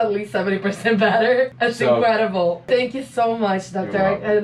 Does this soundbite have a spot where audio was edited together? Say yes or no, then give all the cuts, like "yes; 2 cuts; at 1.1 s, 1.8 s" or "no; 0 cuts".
yes; 2 cuts; at 1.5 s, 2.7 s